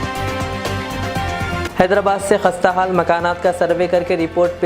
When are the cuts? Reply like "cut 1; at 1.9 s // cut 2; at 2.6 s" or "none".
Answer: cut 1; at 1.6 s